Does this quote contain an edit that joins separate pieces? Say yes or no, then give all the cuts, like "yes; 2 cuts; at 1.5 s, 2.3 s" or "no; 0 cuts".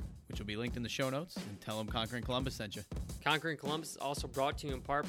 yes; 1 cut; at 3.1 s